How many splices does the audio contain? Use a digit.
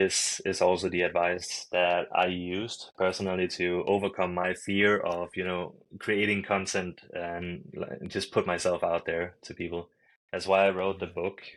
0